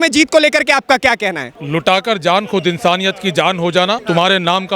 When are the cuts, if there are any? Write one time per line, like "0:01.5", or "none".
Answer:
0:01.5
0:04.0